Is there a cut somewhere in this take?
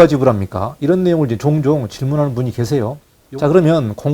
yes; 1 cut; at 3.1 s

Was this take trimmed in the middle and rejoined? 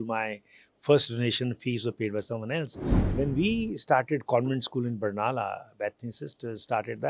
yes; 1 cut; at 2.9 s

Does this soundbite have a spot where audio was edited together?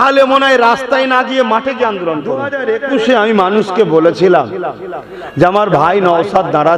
yes; 1 cut; at 2.5 s

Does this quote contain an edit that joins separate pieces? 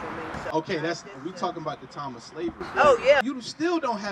yes; 1 cut; at 3.2 s

